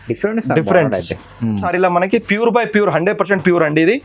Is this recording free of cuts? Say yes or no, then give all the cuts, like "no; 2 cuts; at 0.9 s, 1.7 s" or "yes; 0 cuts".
no; 1 cut; at 1.6 s